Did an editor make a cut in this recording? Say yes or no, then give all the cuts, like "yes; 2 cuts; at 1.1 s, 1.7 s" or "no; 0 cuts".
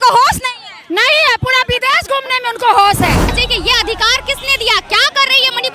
yes; 1 cut; at 3.3 s